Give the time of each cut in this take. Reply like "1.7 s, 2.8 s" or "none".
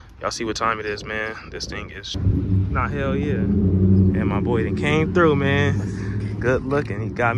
2.0 s